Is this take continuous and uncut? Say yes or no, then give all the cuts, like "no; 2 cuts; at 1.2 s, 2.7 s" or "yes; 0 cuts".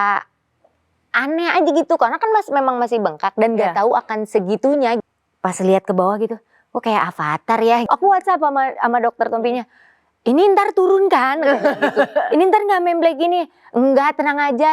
no; 2 cuts; at 5.0 s, 7.8 s